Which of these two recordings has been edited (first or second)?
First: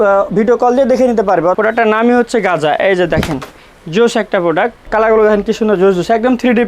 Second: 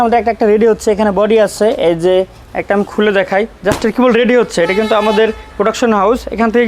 first